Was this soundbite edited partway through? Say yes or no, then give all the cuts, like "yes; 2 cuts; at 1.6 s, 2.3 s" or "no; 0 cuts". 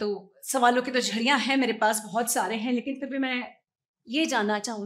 no; 0 cuts